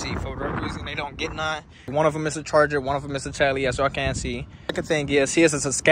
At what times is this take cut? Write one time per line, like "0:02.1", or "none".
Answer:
0:01.8
0:04.7